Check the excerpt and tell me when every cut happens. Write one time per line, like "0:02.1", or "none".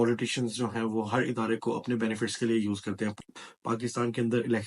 0:03.1